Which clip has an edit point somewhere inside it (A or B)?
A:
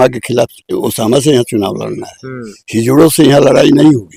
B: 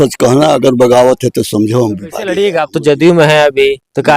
B